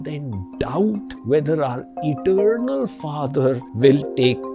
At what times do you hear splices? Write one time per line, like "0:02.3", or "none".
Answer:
0:01.1
0:03.7